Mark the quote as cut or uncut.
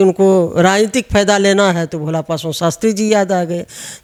uncut